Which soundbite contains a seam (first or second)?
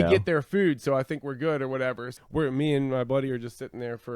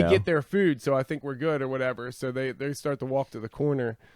first